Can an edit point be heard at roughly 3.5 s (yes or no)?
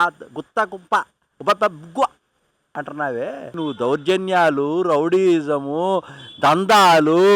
yes